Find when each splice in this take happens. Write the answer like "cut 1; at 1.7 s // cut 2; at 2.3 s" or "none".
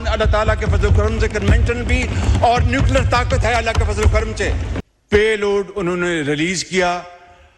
cut 1; at 4.8 s

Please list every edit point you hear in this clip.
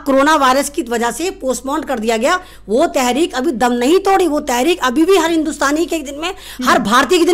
none

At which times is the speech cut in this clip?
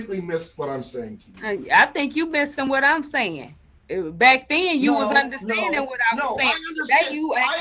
none

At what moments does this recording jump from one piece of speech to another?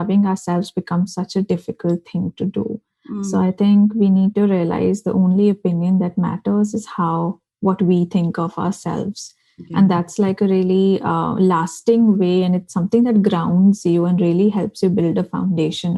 none

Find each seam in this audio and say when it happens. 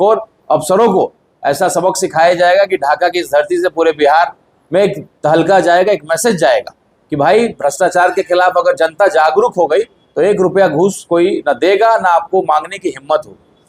none

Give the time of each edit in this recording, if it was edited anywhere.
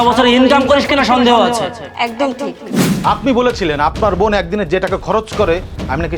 cut 1; at 2.8 s

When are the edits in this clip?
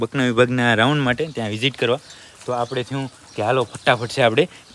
none

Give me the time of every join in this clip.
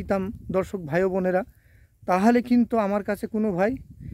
none

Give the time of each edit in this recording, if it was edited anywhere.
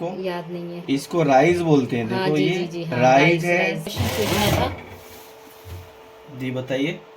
cut 1; at 3.9 s

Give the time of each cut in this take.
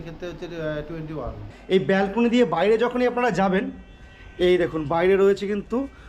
cut 1; at 1.5 s

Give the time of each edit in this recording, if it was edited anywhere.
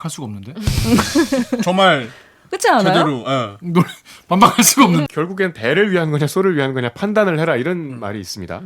cut 1; at 5.1 s

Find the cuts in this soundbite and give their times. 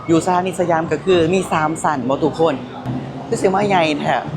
cut 1; at 2.9 s

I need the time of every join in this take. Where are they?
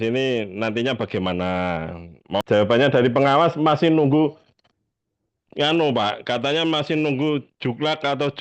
cut 1; at 2.4 s

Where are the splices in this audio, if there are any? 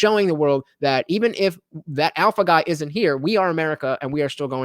none

